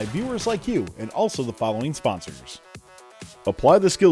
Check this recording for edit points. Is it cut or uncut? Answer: cut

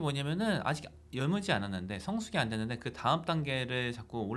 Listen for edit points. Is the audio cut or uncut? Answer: uncut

